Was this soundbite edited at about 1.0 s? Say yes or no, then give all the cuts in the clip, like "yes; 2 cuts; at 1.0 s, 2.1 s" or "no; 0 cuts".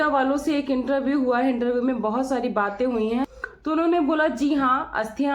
no; 1 cut; at 3.5 s